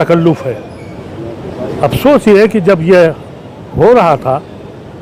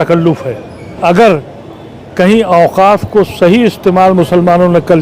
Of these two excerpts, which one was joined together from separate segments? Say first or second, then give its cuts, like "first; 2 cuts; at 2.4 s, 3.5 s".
second; 1 cut; at 1.0 s